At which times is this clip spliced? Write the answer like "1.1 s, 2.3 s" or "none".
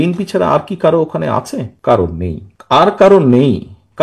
none